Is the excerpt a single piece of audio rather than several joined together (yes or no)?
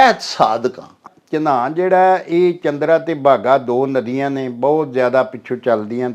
no